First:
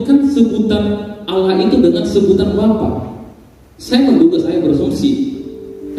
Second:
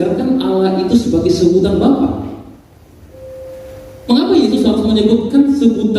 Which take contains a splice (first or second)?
second